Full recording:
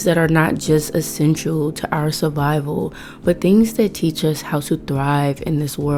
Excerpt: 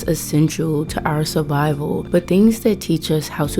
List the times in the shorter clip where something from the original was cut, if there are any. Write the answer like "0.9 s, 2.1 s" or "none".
2.0 s